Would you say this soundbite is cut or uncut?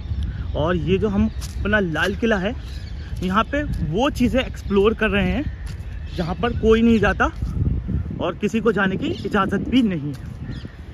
uncut